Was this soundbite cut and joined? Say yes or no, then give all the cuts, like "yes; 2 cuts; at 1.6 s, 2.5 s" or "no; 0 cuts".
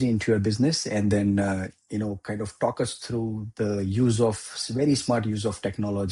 no; 0 cuts